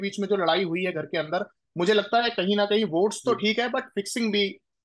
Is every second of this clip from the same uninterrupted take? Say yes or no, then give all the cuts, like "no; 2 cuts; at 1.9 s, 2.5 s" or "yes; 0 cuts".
no; 1 cut; at 1.6 s